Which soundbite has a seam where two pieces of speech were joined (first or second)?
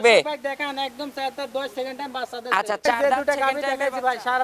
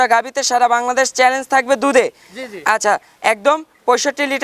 first